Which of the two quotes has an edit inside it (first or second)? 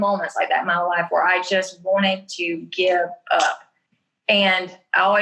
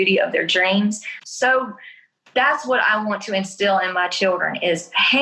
second